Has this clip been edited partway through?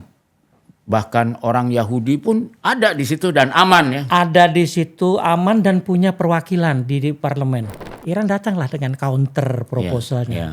yes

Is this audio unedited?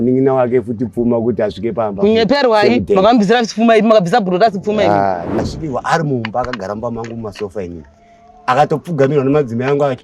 no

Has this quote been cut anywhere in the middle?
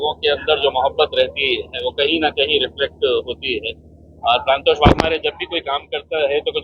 no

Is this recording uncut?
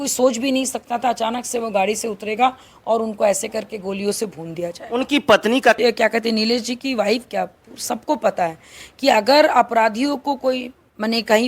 no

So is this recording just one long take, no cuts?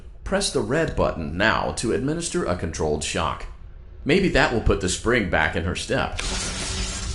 no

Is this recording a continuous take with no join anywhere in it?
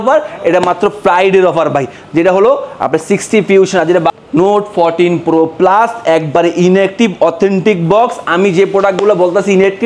no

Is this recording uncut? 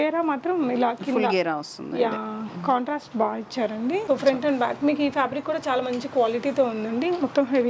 no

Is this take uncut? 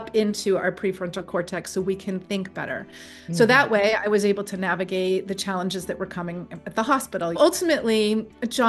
no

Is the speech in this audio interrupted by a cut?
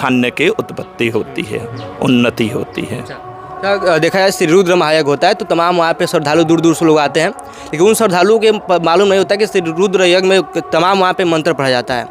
no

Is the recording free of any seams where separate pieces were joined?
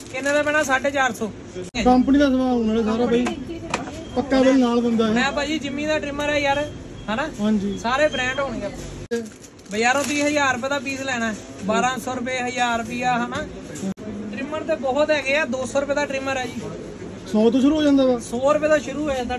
no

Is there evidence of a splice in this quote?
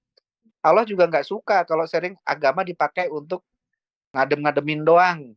yes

